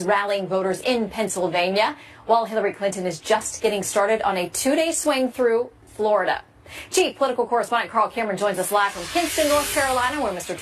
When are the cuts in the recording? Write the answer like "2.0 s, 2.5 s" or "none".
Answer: 2.5 s